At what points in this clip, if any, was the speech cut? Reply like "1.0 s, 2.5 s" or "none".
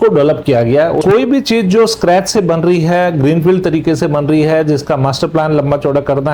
1.0 s